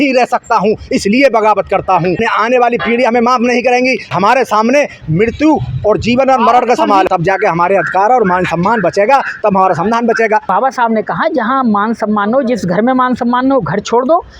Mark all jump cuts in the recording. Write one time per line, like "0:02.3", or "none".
0:02.2
0:04.1
0:07.1
0:10.4